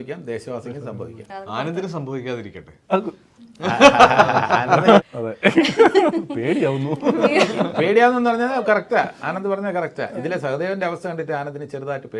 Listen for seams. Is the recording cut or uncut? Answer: uncut